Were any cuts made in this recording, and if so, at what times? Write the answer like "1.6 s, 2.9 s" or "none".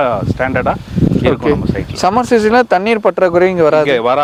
none